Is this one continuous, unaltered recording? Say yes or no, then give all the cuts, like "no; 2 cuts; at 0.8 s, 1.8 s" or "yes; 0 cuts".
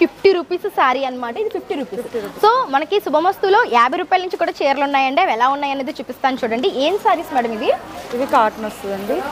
yes; 0 cuts